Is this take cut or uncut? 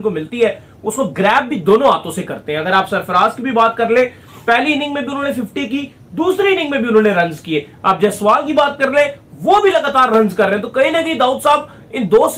uncut